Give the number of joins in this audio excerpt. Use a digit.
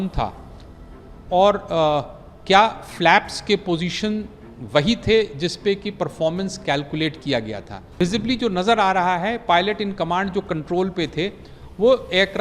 1